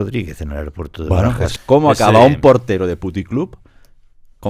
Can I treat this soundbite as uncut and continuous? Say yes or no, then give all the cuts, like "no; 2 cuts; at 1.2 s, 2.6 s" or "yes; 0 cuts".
no; 1 cut; at 1.5 s